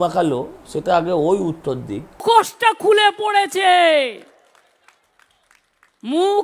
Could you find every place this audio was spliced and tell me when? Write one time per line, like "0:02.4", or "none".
0:02.2